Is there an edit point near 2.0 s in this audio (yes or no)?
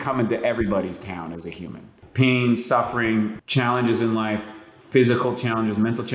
yes